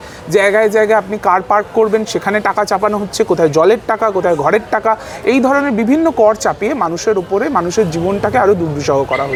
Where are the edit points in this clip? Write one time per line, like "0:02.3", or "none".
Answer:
none